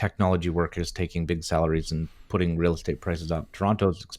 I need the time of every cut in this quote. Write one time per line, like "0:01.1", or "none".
none